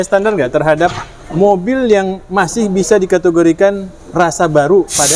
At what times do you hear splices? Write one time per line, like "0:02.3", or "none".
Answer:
none